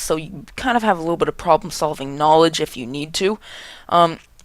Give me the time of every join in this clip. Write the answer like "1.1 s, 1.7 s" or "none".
1.5 s